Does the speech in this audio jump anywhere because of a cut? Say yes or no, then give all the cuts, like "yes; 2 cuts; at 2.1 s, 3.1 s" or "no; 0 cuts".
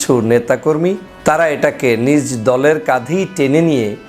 yes; 1 cut; at 1.1 s